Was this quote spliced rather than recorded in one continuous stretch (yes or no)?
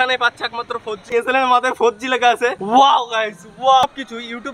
yes